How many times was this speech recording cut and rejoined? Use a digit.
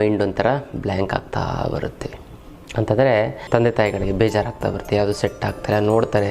1